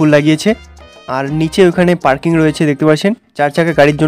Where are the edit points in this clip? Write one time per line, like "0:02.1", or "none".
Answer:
none